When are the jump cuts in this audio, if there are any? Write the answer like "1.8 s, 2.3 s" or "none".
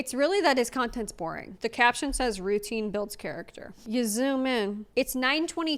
1.6 s, 3.8 s, 4.9 s